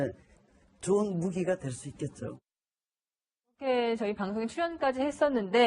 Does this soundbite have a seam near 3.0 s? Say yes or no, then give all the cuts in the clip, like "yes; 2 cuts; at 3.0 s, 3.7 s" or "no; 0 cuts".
no; 1 cut; at 4.3 s